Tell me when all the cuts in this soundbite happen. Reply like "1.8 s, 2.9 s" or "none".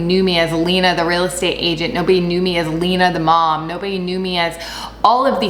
none